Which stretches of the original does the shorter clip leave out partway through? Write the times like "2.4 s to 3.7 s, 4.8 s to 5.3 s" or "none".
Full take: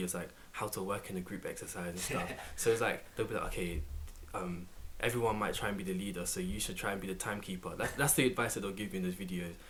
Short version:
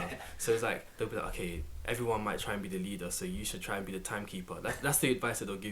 3.9 s to 4.8 s